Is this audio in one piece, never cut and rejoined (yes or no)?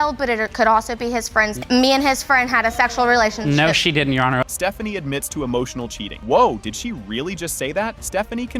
yes